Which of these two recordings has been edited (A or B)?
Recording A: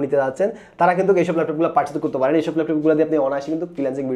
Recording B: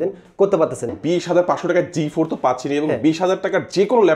B